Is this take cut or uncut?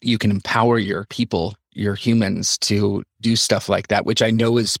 cut